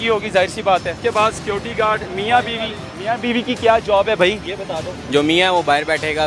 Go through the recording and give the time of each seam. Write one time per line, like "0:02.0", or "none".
0:01.0
0:04.9